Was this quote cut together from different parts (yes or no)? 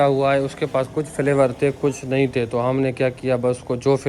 no